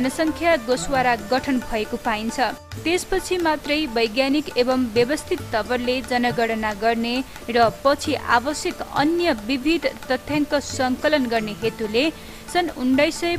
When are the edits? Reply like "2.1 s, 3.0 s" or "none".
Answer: none

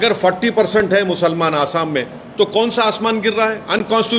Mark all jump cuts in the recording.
none

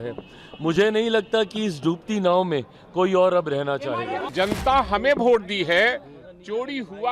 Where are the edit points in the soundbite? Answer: 4.3 s

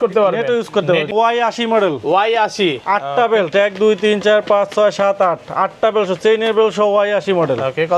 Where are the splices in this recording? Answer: 1.1 s

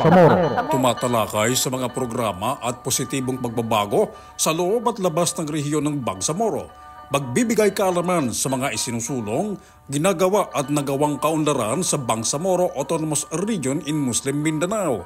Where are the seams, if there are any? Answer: none

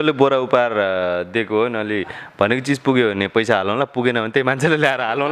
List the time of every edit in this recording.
none

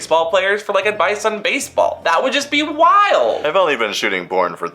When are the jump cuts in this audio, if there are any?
3.4 s

